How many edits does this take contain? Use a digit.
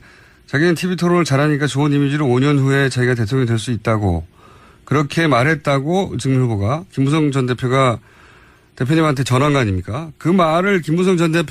1